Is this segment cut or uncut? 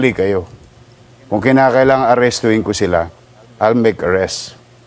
uncut